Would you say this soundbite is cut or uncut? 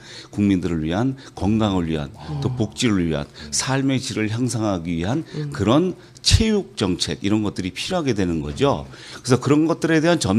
cut